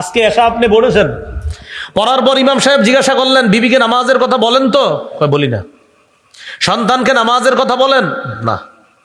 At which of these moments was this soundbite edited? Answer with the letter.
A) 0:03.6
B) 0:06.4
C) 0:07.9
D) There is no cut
D